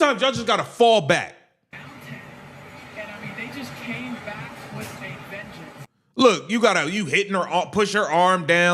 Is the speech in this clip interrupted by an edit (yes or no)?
yes